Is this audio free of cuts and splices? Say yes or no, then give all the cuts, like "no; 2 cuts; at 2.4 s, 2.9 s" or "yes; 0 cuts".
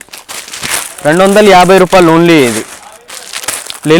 yes; 0 cuts